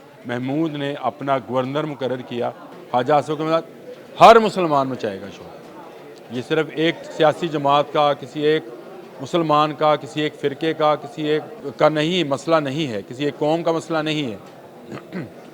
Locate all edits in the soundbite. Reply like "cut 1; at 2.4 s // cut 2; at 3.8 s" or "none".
cut 1; at 2.7 s // cut 2; at 11.6 s